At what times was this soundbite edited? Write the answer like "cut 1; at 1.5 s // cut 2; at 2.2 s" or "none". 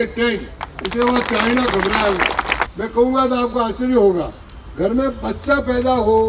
cut 1; at 2.6 s